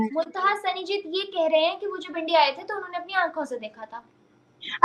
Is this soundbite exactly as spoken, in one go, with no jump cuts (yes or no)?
yes